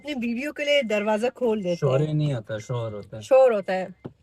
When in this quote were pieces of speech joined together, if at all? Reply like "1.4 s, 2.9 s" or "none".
none